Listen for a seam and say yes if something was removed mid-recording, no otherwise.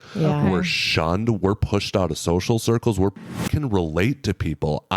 yes